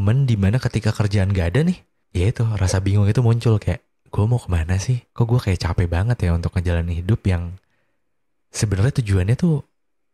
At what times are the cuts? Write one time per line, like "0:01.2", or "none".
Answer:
0:02.0
0:05.1